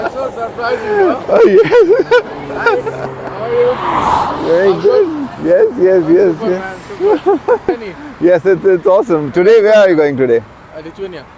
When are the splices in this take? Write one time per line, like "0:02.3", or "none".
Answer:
0:07.7